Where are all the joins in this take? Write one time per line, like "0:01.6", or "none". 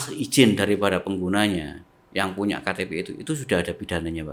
none